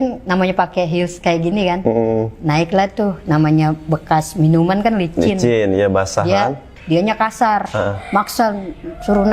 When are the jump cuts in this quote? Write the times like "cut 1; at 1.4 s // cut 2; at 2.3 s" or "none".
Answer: cut 1; at 6.7 s